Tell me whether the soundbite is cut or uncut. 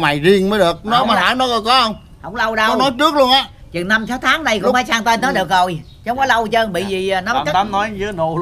uncut